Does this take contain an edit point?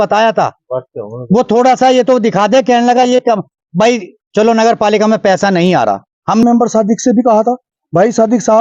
yes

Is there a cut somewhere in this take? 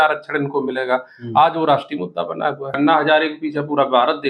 yes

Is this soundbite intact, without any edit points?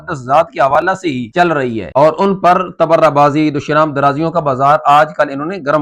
yes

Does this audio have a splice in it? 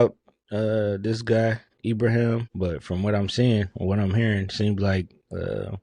yes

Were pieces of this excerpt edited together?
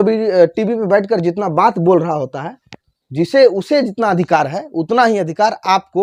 no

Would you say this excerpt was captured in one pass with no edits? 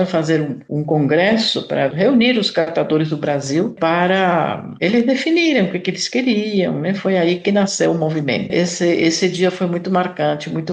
no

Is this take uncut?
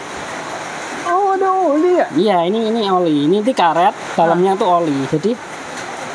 yes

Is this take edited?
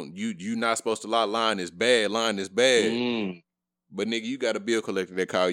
no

